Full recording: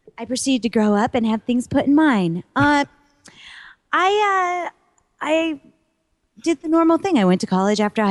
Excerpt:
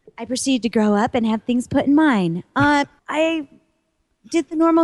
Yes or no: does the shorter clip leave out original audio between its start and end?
yes